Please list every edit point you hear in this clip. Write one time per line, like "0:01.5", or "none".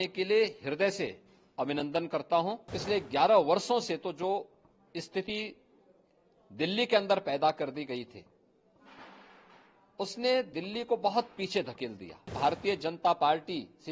0:02.8
0:12.3